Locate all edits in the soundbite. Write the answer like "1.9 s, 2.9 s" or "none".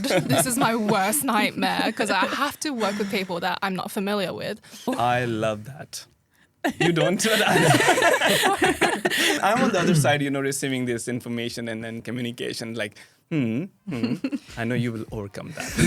4.9 s, 9.4 s, 12.0 s